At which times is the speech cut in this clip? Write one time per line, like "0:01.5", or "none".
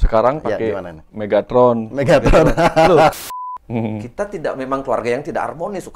0:03.2